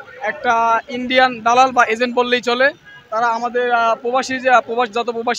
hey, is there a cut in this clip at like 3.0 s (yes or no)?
no